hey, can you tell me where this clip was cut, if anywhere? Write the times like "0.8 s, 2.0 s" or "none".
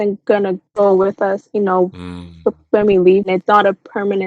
3.3 s